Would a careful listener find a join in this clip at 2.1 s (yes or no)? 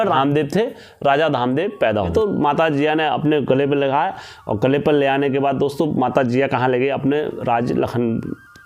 yes